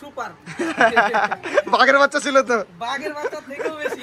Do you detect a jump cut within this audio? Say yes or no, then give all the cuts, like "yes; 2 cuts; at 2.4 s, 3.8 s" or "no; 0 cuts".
no; 0 cuts